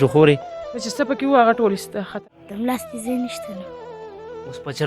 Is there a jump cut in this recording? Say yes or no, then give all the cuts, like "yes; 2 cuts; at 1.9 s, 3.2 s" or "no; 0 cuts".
yes; 1 cut; at 2.2 s